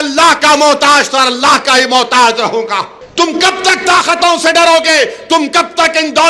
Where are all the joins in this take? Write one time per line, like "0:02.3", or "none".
0:03.0